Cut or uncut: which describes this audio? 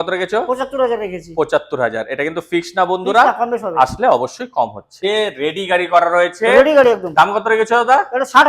cut